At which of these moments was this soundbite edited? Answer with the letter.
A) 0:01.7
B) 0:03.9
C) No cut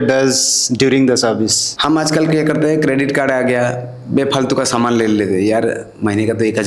A